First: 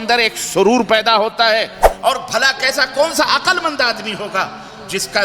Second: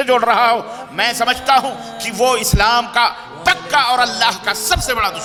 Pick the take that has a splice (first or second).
first